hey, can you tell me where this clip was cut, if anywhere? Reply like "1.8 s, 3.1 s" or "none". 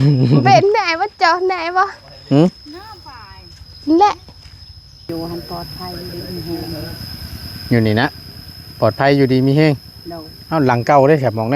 5.1 s